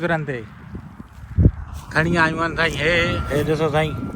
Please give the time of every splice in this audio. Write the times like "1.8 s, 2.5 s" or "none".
3.2 s